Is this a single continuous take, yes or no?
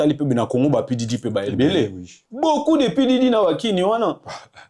yes